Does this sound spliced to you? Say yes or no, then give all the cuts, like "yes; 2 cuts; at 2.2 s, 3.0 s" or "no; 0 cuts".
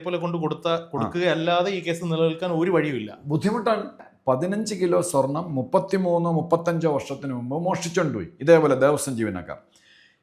yes; 1 cut; at 4.0 s